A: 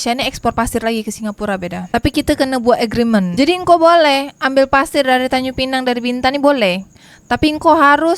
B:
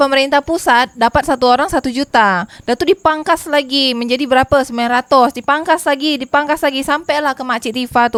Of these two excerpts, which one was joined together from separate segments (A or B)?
A